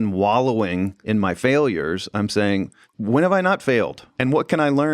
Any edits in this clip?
yes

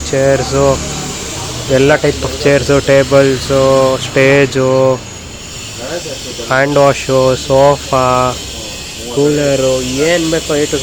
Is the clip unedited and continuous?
yes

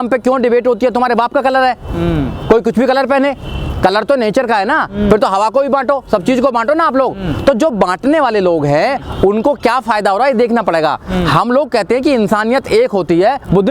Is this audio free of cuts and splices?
yes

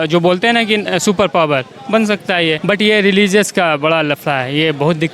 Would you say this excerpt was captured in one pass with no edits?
no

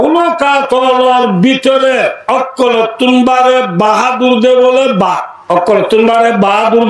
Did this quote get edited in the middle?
yes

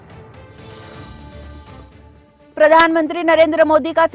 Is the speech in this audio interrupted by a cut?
yes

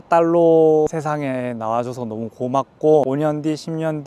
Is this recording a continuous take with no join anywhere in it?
no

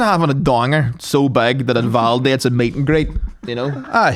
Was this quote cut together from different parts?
no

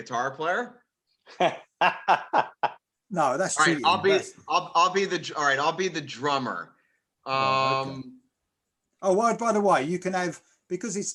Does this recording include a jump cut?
no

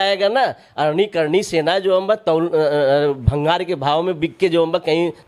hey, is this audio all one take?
yes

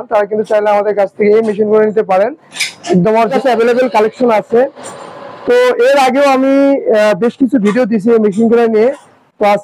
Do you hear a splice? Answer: yes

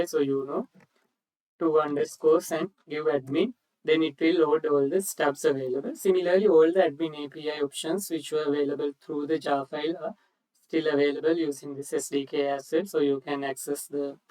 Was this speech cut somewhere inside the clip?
no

